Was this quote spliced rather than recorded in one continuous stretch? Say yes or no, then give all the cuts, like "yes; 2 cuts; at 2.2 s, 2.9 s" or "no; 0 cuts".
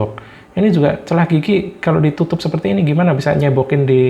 no; 0 cuts